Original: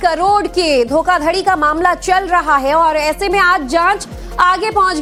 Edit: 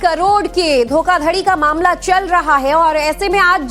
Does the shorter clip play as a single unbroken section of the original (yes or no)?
yes